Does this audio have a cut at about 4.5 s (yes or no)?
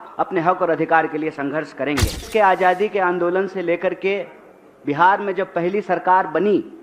no